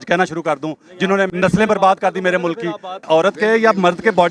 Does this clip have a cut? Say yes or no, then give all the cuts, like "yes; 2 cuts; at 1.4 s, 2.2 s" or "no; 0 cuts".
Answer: yes; 2 cuts; at 1.3 s, 3.0 s